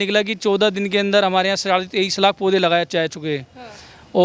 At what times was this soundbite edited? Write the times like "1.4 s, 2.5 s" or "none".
none